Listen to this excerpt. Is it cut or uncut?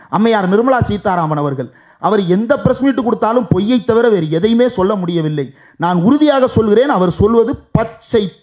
uncut